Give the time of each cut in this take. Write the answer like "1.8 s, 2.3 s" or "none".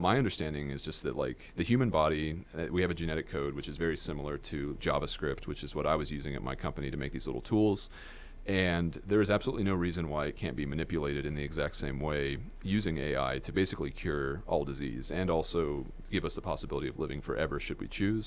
none